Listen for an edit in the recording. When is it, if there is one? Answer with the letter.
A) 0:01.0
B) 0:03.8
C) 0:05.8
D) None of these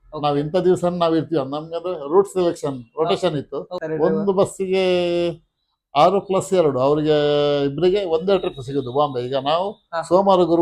B